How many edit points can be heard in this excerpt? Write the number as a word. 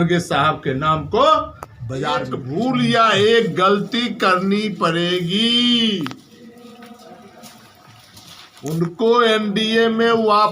one